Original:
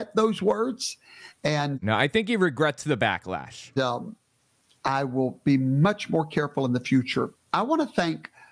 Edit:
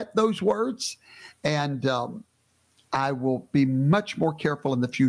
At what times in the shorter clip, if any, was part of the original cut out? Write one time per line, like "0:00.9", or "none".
0:01.7